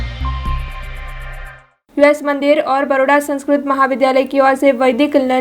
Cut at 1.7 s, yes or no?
yes